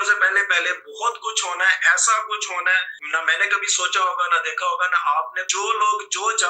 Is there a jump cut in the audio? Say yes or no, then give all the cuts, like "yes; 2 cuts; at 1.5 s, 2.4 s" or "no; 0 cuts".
yes; 2 cuts; at 3.0 s, 5.4 s